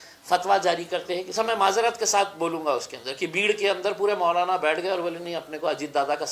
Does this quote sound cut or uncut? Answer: cut